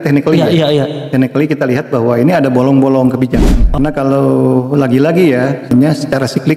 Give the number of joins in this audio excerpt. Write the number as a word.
two